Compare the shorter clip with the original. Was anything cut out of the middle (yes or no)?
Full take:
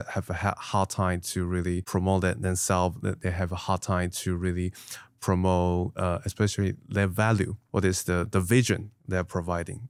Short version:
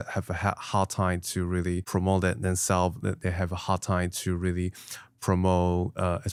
no